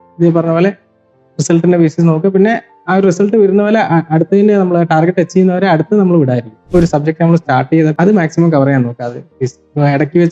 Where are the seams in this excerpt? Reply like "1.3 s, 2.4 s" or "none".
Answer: 6.7 s, 7.9 s